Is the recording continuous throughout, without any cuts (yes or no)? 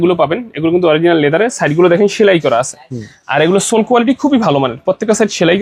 yes